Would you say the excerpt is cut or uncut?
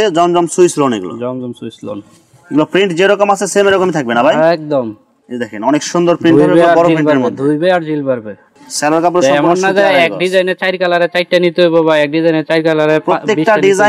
uncut